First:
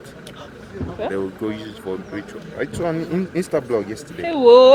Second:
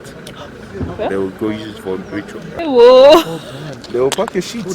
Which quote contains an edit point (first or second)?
second